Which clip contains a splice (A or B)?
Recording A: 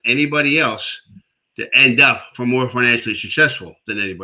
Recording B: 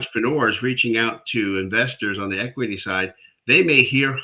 A